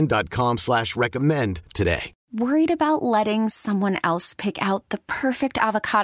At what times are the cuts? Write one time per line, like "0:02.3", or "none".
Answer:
0:02.2